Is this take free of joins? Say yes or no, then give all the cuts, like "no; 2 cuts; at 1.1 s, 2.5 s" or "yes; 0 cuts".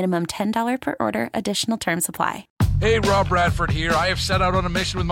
no; 1 cut; at 2.5 s